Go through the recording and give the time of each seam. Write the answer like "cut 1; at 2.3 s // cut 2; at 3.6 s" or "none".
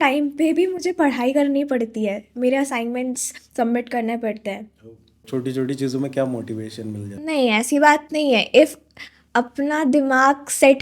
cut 1; at 5.2 s